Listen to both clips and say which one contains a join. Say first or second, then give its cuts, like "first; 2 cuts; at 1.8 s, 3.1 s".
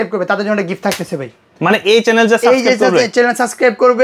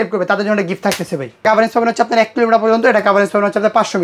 second; 1 cut; at 1.4 s